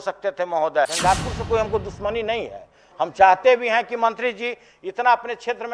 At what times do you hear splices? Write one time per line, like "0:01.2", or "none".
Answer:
0:00.9

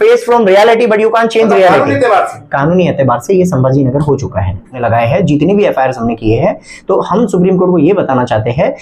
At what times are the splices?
0:04.8

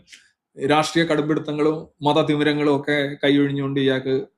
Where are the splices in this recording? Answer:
none

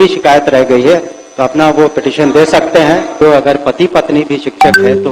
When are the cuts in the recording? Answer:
0:03.2

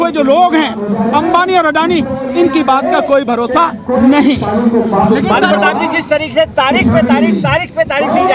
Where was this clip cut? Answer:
none

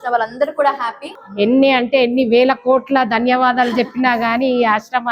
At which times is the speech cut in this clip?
0:01.2

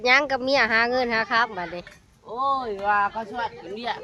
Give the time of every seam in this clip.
none

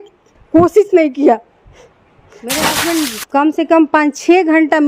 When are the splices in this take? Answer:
0:02.3

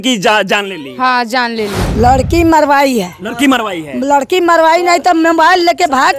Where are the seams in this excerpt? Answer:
0:01.8

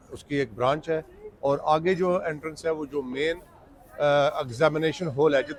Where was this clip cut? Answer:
none

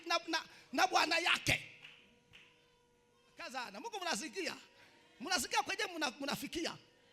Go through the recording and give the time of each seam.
0:03.5

